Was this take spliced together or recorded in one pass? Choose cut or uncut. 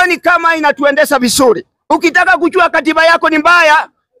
cut